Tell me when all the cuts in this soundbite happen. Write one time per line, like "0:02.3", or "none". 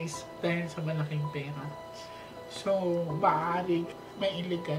0:03.9